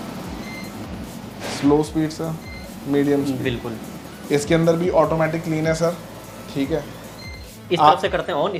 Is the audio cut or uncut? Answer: uncut